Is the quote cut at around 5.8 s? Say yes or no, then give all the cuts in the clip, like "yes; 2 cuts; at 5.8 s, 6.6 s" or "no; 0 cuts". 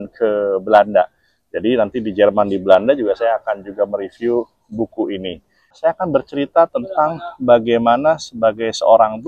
yes; 1 cut; at 5.8 s